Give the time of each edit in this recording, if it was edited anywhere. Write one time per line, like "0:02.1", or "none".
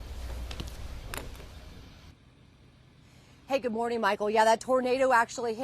0:04.4